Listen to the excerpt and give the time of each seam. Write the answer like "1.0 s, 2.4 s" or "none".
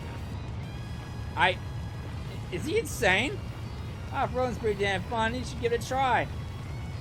none